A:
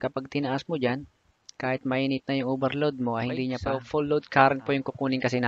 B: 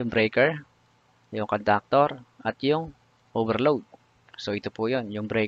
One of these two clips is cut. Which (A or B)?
A